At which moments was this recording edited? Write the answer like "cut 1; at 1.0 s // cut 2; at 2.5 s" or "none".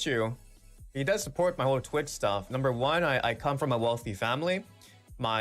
cut 1; at 2.5 s